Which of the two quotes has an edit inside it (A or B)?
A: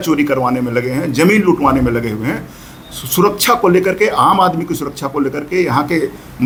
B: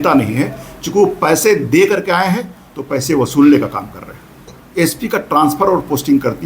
B